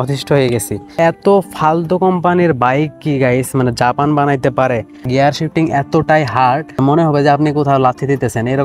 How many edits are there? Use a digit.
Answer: 3